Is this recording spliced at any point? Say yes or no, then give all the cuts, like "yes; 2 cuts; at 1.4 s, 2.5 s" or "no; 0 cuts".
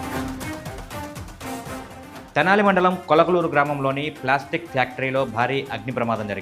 yes; 1 cut; at 2.2 s